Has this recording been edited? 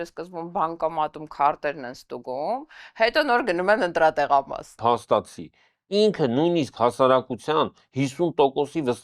yes; 1 cut; at 4.7 s

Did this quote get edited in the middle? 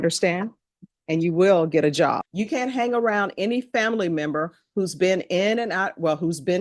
yes; 1 cut; at 2.3 s

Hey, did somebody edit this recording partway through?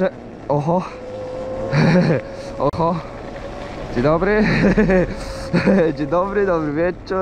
no; 0 cuts

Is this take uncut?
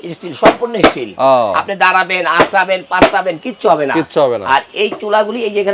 yes; 0 cuts

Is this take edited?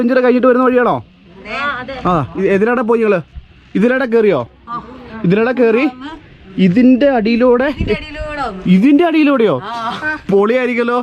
no; 0 cuts

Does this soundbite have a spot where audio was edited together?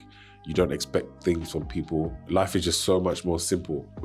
yes; 1 cut; at 2.2 s

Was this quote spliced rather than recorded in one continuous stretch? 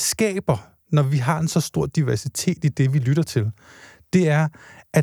no; 0 cuts

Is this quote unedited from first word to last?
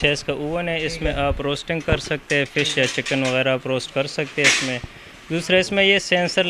yes; 0 cuts

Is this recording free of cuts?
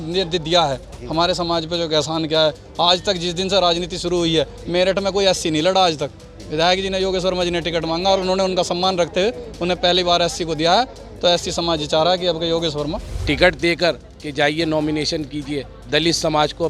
no; 1 cut; at 13.1 s

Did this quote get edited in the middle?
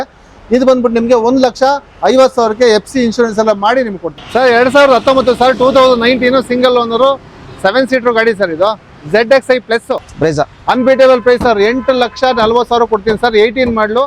yes; 2 cuts; at 4.2 s, 10.1 s

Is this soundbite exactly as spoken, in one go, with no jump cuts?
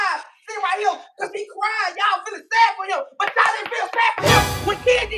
yes; 0 cuts

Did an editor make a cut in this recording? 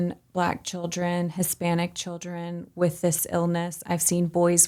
no; 0 cuts

